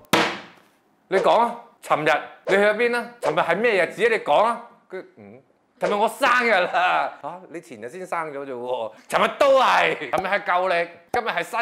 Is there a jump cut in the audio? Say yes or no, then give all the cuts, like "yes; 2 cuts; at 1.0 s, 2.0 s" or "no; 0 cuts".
yes; 1 cut; at 10.0 s